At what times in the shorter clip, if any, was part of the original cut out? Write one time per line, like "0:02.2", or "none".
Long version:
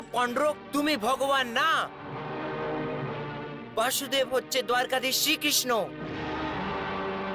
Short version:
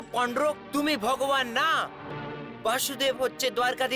0:02.1